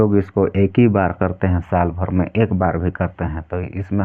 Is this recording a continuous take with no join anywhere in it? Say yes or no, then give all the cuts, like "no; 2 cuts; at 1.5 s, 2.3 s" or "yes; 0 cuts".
yes; 0 cuts